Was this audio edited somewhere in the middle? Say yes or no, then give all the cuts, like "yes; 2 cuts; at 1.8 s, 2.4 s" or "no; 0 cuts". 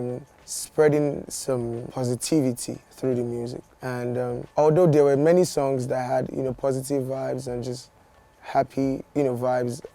no; 0 cuts